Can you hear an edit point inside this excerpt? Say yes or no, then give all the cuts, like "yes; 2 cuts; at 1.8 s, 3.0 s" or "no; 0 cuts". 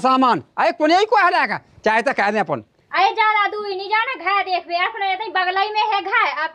yes; 1 cut; at 2.7 s